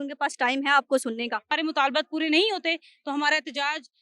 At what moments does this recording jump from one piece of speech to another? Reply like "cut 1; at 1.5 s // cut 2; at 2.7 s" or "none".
cut 1; at 1.5 s